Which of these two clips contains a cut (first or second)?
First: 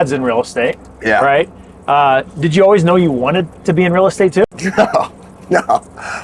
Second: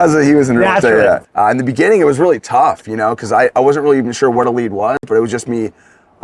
second